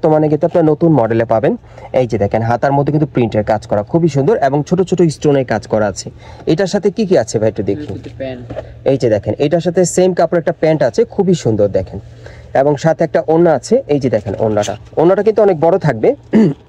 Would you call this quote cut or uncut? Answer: uncut